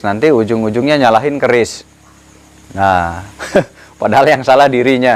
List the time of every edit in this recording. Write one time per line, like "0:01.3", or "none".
none